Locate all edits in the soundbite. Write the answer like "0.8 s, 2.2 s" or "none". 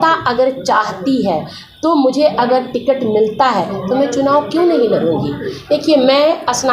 5.5 s